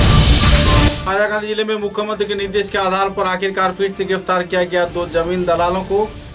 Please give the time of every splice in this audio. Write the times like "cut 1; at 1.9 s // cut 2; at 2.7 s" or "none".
cut 1; at 1.0 s